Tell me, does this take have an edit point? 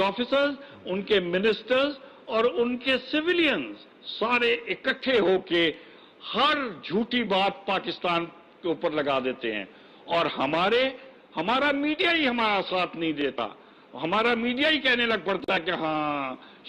no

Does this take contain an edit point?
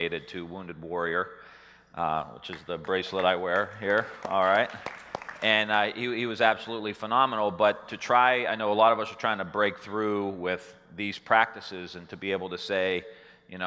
no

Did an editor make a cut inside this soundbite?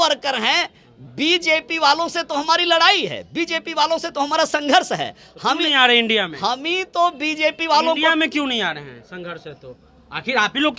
no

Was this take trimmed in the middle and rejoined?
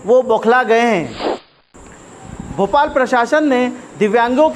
yes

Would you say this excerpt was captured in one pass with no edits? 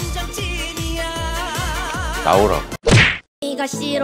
yes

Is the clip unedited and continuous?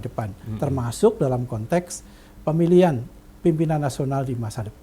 yes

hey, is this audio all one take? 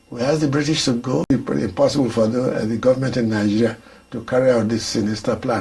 no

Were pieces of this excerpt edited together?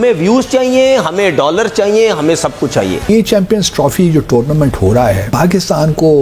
yes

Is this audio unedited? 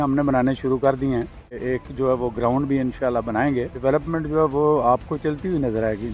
no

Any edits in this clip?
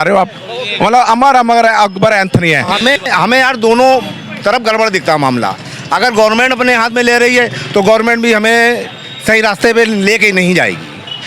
yes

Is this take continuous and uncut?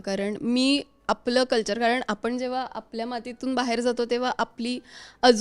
yes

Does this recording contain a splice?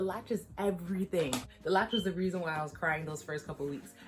yes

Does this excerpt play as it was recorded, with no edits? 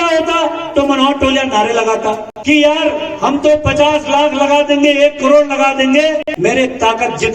no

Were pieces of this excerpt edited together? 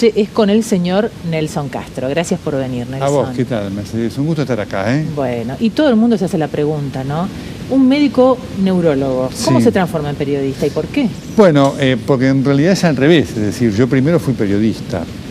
yes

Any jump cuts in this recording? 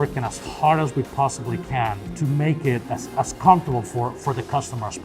yes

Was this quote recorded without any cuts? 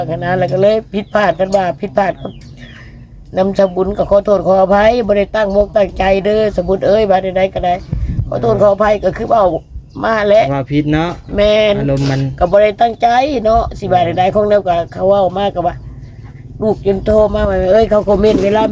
yes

